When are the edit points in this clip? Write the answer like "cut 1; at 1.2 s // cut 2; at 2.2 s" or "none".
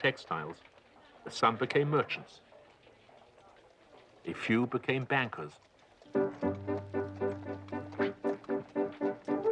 cut 1; at 1.1 s